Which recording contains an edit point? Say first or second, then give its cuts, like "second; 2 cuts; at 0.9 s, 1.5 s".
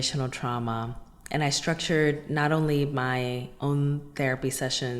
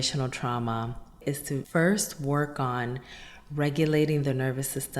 second; 1 cut; at 1.2 s